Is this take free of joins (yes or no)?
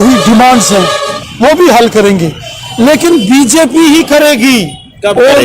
no